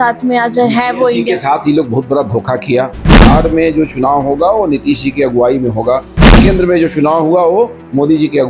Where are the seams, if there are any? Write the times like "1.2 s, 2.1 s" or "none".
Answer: 3.2 s, 6.4 s

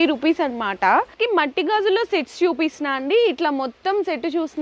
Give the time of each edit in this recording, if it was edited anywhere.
1.1 s

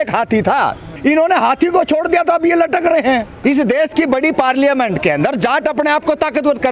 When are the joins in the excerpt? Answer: 0.9 s, 3.4 s

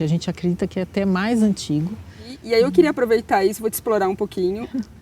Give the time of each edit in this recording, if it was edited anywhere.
2.3 s

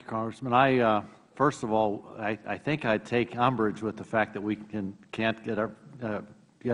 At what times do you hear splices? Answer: none

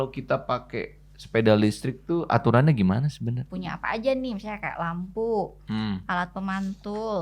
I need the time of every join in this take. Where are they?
3.5 s

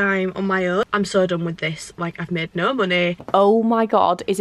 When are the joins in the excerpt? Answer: 0.8 s, 3.2 s

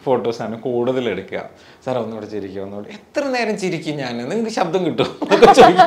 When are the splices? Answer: none

